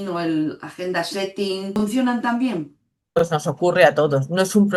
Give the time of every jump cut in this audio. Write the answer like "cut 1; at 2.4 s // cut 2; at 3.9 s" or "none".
cut 1; at 1.7 s // cut 2; at 3.2 s